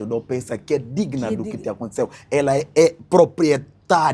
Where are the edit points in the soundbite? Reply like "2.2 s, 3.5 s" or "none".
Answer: none